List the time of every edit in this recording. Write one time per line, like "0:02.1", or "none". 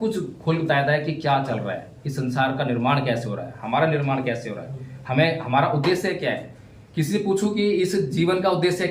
none